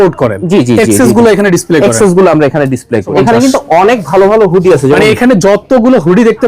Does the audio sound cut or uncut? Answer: cut